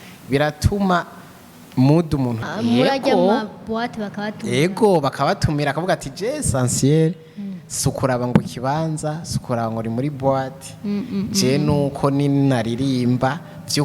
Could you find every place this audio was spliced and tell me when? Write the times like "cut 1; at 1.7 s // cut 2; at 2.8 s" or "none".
cut 1; at 2.4 s